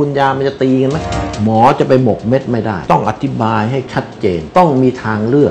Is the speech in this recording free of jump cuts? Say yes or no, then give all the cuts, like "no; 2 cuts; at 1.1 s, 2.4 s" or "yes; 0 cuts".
no; 2 cuts; at 1.1 s, 4.5 s